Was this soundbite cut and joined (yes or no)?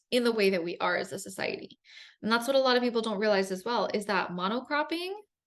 no